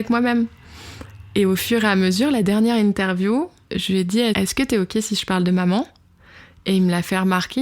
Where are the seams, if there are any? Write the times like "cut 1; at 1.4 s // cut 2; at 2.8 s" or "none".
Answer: cut 1; at 3.8 s